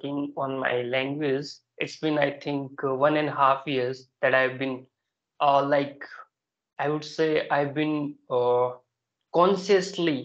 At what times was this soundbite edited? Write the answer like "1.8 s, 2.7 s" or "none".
none